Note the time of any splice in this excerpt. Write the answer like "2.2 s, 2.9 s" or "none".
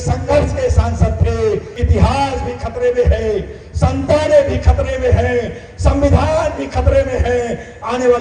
1.7 s